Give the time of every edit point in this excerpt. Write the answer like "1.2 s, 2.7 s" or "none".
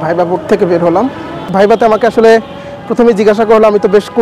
1.4 s